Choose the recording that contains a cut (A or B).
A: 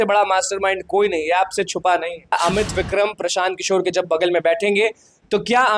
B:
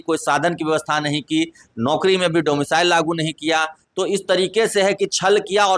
A